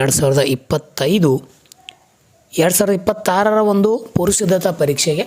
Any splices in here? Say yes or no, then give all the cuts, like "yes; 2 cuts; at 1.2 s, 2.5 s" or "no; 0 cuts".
no; 0 cuts